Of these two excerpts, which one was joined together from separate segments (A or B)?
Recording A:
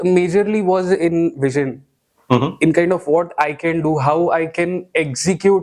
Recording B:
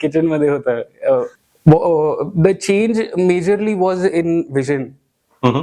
B